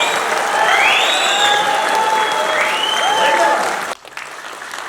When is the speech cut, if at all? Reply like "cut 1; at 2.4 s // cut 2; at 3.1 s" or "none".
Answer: cut 1; at 3.9 s

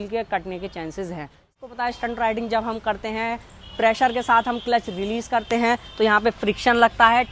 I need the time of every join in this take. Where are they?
cut 1; at 1.6 s

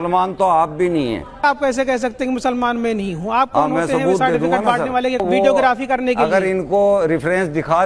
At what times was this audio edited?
cut 1; at 1.4 s // cut 2; at 5.2 s

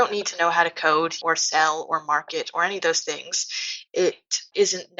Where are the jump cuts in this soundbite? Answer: cut 1; at 1.2 s // cut 2; at 3.7 s

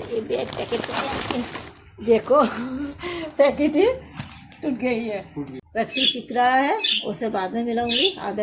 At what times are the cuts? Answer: cut 1; at 5.6 s

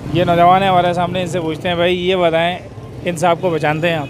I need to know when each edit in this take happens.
none

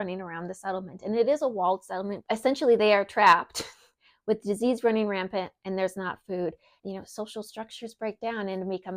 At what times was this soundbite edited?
cut 1; at 2.2 s

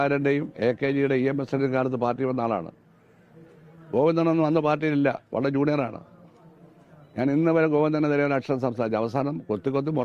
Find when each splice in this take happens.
none

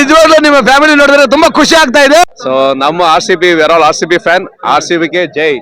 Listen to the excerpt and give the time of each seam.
cut 1; at 2.3 s

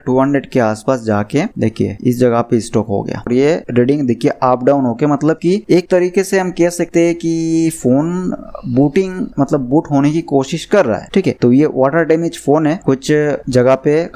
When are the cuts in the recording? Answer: none

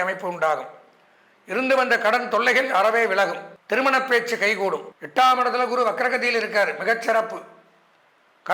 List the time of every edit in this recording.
cut 1; at 3.5 s // cut 2; at 4.9 s

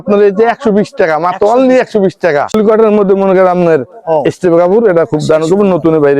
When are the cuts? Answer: cut 1; at 2.5 s

